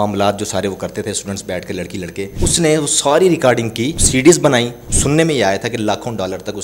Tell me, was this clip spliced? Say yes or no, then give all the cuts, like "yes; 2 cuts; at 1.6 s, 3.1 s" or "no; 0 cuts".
yes; 3 cuts; at 2.3 s, 4.0 s, 4.8 s